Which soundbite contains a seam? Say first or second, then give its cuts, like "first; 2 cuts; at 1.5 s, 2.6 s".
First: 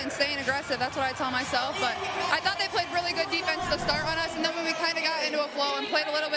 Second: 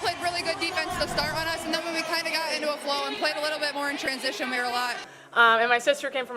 second; 1 cut; at 5.1 s